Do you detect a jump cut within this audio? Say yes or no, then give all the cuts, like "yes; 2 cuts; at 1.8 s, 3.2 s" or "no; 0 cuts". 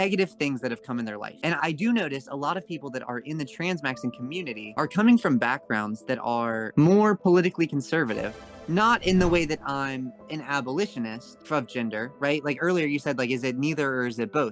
yes; 1 cut; at 8.3 s